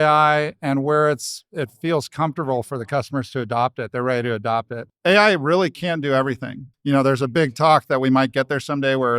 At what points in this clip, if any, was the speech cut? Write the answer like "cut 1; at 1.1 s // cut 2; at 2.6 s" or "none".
cut 1; at 4.8 s // cut 2; at 6.6 s